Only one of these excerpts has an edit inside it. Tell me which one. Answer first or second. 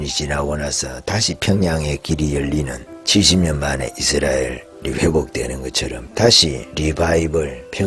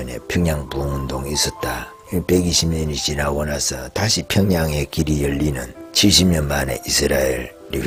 first